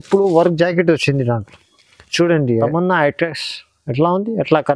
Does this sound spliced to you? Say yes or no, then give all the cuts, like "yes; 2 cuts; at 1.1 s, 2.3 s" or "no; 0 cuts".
yes; 1 cut; at 2.7 s